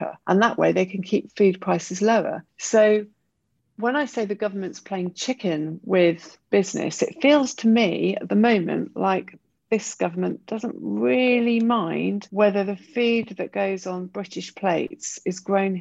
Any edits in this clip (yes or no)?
no